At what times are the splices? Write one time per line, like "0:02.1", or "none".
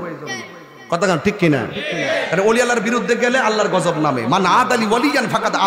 none